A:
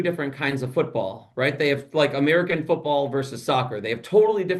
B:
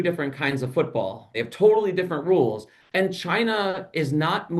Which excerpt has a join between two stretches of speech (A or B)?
B